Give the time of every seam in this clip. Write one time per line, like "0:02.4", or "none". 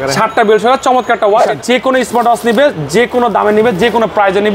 0:01.5